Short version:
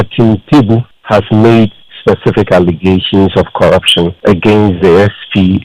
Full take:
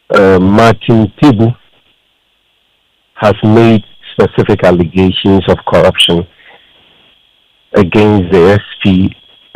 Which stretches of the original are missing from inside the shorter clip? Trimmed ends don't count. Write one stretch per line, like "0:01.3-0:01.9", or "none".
0:01.6-0:03.1
0:06.3-0:07.7